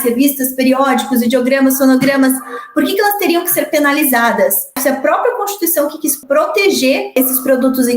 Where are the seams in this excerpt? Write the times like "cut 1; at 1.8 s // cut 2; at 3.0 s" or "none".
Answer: cut 1; at 4.7 s // cut 2; at 6.2 s // cut 3; at 7.2 s